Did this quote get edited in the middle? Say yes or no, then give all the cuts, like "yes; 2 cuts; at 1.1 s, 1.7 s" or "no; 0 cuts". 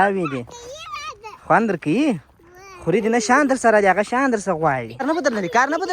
yes; 1 cut; at 5.0 s